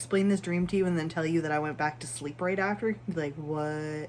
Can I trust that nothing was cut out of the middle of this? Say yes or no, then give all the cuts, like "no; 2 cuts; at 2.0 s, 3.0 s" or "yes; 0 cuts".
yes; 0 cuts